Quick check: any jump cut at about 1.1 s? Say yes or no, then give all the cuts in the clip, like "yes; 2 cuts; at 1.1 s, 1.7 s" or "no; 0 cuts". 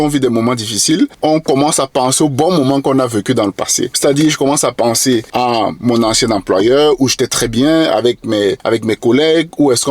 yes; 4 cuts; at 1.1 s, 3.8 s, 5.3 s, 8.6 s